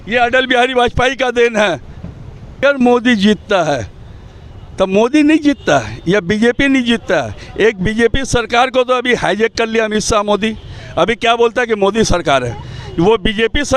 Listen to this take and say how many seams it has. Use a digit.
1